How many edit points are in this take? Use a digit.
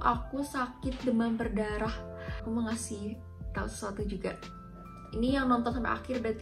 1